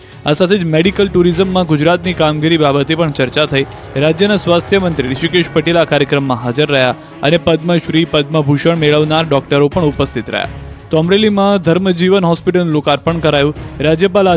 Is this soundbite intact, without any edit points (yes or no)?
no